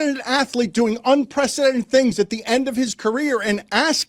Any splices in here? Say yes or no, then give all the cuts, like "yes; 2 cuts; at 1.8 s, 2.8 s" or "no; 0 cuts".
no; 0 cuts